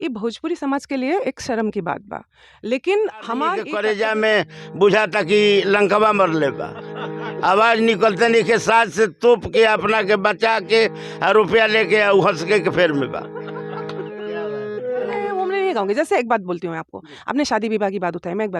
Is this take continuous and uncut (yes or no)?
no